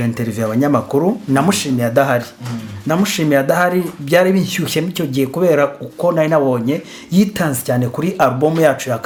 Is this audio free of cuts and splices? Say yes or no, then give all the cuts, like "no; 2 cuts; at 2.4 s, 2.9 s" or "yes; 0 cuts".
yes; 0 cuts